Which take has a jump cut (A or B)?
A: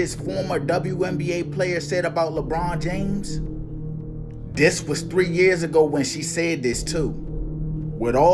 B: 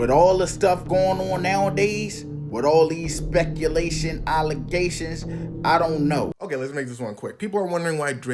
B